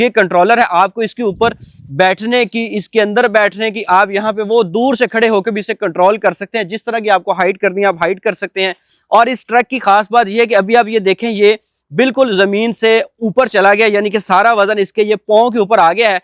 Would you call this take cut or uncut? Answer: cut